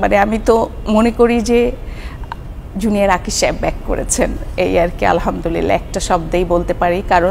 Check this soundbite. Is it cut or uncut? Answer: uncut